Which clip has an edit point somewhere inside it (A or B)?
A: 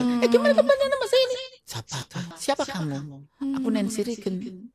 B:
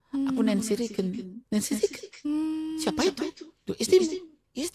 A